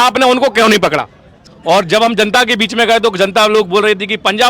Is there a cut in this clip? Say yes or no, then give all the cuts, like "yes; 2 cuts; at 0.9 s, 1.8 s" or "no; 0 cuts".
yes; 1 cut; at 1.4 s